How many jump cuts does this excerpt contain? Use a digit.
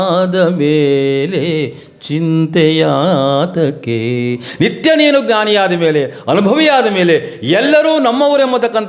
0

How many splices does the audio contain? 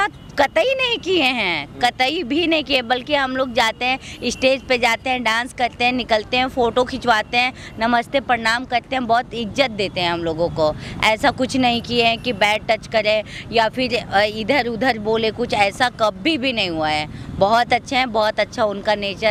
0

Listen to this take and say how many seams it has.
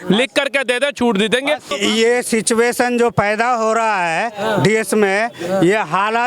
1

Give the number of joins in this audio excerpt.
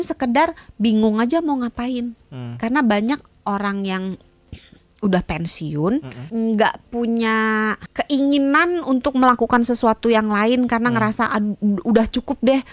2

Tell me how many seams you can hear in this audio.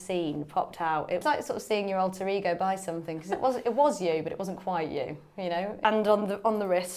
2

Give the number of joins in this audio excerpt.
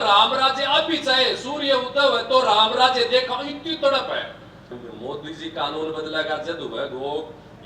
1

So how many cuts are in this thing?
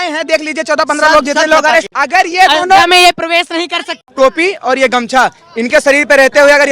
2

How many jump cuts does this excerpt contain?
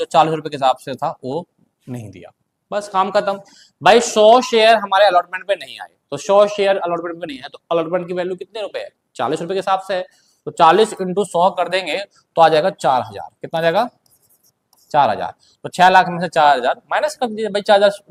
0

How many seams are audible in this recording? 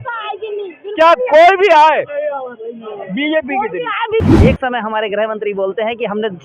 1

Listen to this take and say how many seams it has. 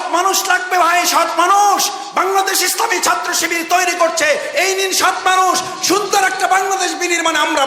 0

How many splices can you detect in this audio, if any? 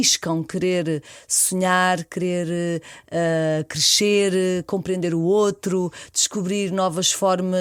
0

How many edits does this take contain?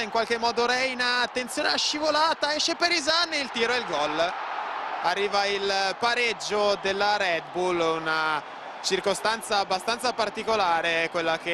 1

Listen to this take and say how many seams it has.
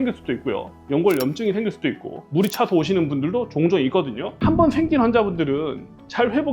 1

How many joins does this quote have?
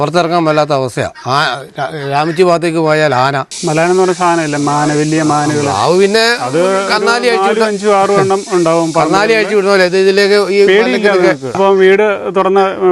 2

